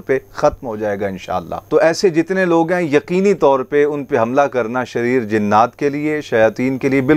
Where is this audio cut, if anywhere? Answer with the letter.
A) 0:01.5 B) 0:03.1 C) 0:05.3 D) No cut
A